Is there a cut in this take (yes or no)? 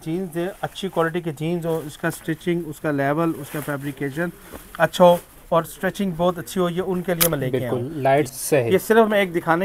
yes